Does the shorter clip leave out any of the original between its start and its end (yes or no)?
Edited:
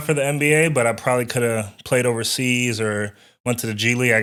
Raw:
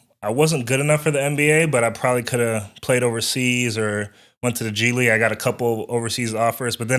no